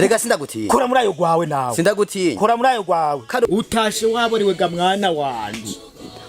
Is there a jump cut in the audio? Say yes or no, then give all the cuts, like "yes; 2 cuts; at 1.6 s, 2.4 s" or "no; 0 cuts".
yes; 1 cut; at 3.5 s